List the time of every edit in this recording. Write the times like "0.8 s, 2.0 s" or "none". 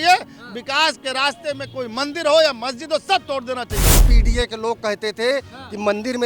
4.1 s